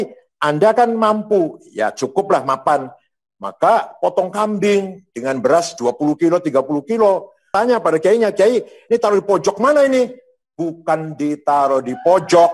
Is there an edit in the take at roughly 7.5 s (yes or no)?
yes